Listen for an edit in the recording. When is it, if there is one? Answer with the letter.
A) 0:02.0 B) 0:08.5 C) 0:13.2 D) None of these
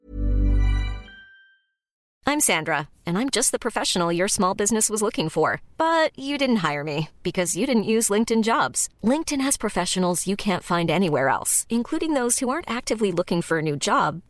A